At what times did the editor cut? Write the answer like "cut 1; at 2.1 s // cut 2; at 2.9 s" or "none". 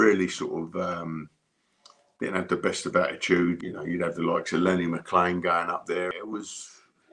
cut 1; at 3.7 s // cut 2; at 6.1 s